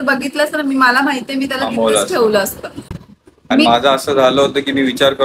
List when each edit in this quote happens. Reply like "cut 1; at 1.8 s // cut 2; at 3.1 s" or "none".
none